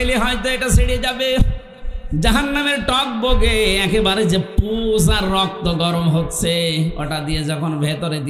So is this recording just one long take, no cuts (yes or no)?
yes